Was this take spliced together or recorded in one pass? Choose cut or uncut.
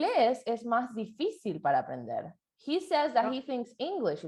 uncut